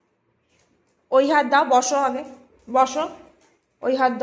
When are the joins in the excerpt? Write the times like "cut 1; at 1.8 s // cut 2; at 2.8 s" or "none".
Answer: none